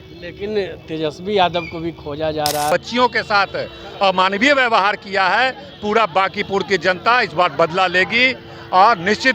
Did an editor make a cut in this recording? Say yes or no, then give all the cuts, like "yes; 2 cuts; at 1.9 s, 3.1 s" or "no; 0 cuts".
yes; 1 cut; at 2.7 s